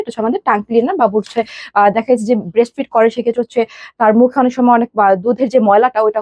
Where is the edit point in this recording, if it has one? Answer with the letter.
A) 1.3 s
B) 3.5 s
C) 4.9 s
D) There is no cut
D